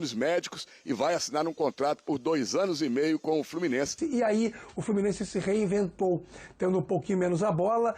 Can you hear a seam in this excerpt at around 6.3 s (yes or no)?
no